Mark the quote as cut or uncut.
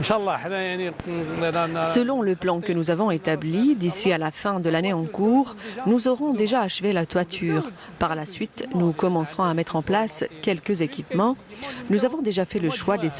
cut